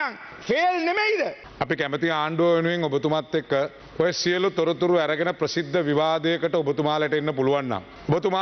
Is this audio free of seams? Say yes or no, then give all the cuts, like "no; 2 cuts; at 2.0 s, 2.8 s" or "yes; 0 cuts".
yes; 0 cuts